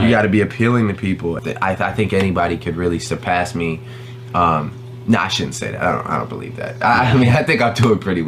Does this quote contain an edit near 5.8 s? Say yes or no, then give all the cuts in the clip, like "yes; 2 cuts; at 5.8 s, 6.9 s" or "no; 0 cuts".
no; 1 cut; at 1.4 s